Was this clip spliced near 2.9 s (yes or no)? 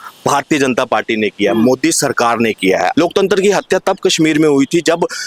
yes